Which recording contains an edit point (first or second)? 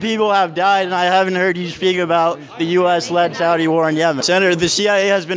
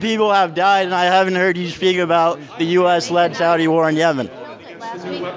first